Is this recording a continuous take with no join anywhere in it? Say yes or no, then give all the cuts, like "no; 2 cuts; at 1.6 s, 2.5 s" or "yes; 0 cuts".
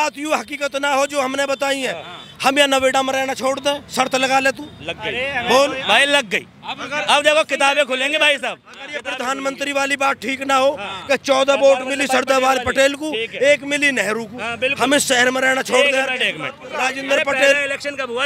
no; 1 cut; at 16.7 s